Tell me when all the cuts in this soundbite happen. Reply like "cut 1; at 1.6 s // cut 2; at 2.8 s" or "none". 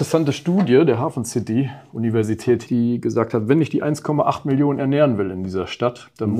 cut 1; at 2.6 s

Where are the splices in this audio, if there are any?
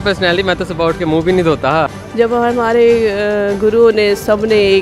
cut 1; at 2.0 s

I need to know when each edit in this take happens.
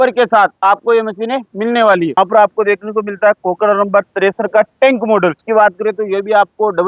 cut 1; at 2.2 s // cut 2; at 5.4 s

